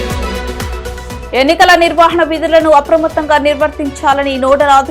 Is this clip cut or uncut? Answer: cut